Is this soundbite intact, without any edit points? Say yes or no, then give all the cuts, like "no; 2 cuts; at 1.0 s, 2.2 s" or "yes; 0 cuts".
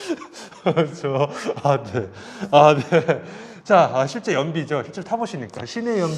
yes; 0 cuts